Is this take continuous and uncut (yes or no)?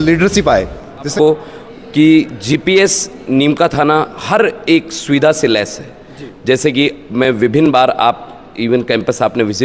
no